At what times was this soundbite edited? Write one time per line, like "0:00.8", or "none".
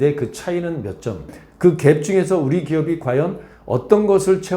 0:01.4